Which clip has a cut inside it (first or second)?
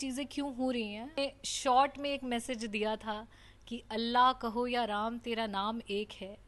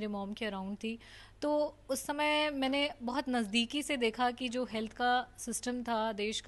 first